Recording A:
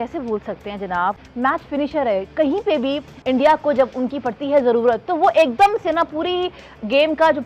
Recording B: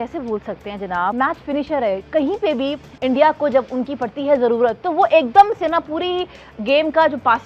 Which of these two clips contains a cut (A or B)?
B